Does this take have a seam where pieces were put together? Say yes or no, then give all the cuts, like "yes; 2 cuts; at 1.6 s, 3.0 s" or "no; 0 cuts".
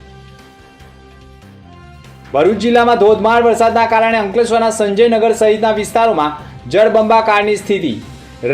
yes; 1 cut; at 2.0 s